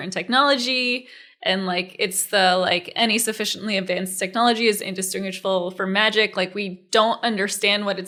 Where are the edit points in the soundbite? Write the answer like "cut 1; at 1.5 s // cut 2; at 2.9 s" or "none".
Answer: none